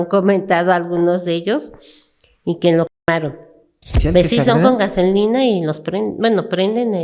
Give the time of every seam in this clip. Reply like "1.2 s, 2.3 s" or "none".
3.9 s